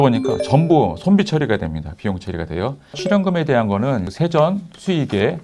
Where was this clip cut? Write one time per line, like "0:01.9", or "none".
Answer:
0:03.0
0:04.1